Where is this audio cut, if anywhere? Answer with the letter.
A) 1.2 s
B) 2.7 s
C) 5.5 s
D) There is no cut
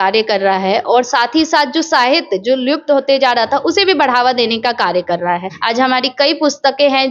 C